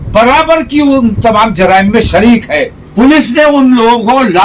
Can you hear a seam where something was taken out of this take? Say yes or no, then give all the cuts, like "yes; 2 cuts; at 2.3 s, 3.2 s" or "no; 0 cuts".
yes; 1 cut; at 2.8 s